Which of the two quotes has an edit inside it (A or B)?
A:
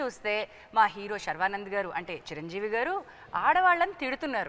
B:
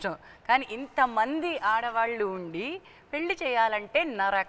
B